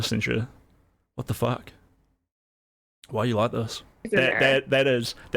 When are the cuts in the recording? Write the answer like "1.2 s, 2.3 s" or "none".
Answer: 4.1 s